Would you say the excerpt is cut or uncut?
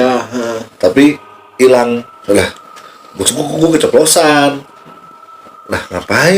cut